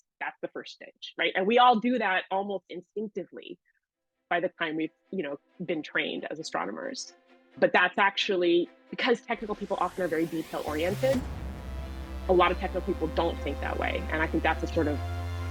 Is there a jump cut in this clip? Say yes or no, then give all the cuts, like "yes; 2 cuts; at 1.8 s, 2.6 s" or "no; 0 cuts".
no; 0 cuts